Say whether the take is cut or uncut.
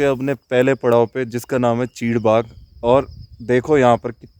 uncut